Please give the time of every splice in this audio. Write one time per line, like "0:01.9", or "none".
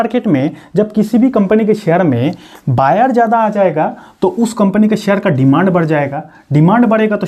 none